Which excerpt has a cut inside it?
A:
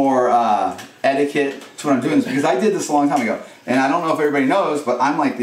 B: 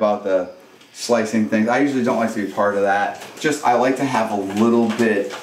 B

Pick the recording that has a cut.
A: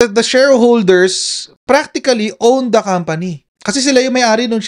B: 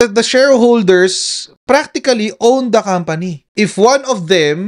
B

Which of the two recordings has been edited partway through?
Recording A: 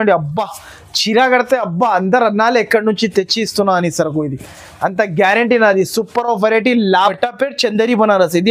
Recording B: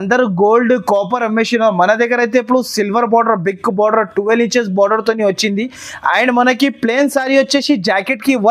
A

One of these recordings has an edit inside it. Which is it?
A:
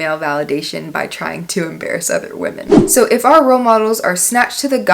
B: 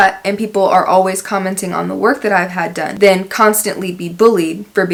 A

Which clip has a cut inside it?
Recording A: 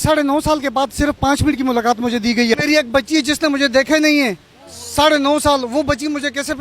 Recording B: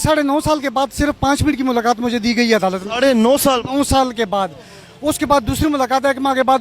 A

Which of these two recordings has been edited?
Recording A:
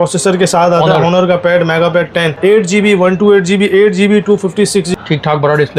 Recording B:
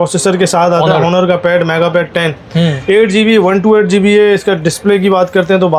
A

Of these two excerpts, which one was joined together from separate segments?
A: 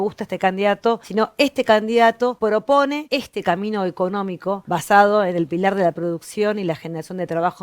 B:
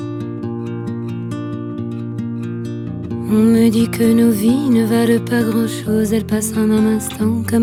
A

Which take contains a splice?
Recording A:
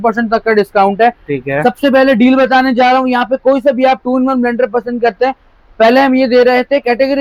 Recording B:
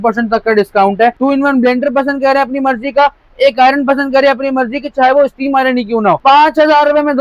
B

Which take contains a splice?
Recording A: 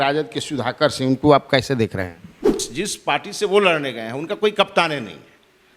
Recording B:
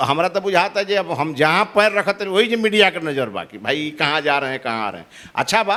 A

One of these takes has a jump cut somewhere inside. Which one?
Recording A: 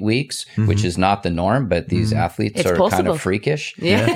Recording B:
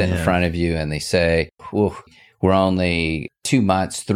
B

